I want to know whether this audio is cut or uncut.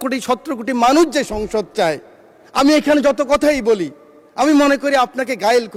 uncut